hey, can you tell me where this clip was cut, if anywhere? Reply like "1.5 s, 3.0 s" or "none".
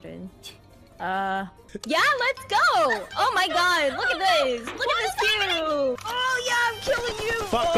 1.6 s, 6.0 s